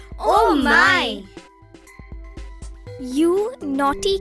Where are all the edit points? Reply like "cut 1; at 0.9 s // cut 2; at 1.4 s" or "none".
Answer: cut 1; at 1.6 s // cut 2; at 3.0 s